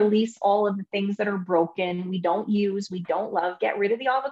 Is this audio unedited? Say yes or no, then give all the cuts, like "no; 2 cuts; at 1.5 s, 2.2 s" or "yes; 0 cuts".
yes; 0 cuts